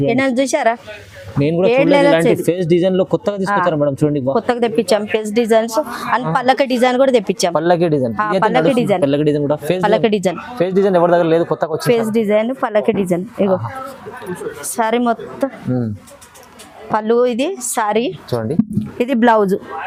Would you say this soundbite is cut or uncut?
uncut